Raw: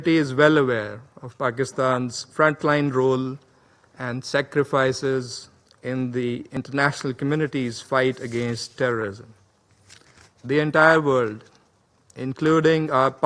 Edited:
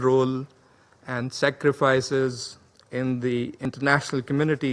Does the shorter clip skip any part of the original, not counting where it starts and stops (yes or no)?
no